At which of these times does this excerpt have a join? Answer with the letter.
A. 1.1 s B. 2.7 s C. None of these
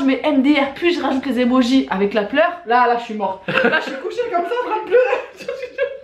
C